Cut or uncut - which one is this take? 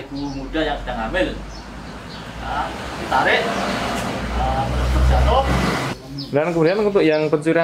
cut